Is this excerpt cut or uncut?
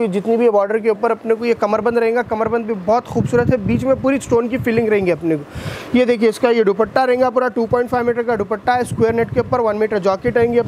uncut